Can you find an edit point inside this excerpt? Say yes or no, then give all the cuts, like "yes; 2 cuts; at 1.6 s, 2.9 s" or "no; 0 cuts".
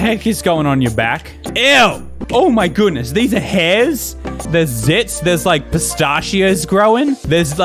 yes; 1 cut; at 2.1 s